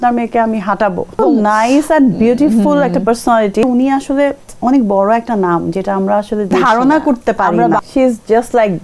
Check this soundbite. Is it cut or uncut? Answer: cut